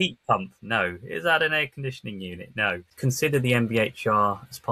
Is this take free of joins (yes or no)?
no